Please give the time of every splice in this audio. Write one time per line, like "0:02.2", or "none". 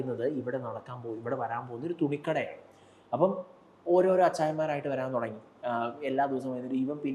none